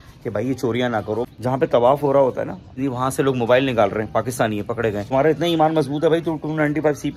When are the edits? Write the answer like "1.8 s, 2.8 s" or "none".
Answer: 1.3 s, 2.7 s, 5.1 s

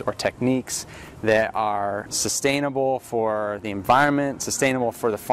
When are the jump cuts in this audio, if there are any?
2.1 s

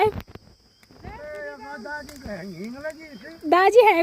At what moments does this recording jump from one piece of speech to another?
none

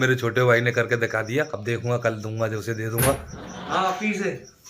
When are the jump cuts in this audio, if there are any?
1.6 s

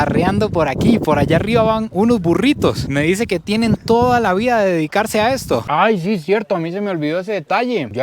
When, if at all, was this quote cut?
5.6 s

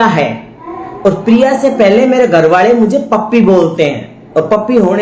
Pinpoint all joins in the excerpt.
none

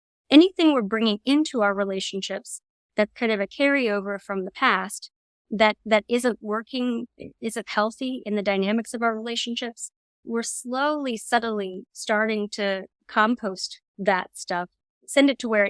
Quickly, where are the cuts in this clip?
10.2 s, 12.9 s

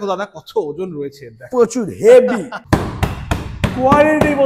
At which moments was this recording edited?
2.6 s

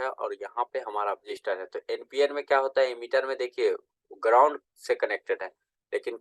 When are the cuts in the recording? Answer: 1.2 s

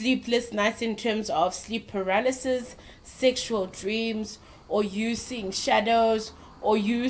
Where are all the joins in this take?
none

